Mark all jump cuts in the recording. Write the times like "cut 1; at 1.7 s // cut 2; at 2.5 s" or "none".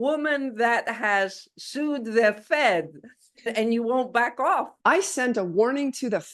cut 1; at 3.5 s // cut 2; at 4.7 s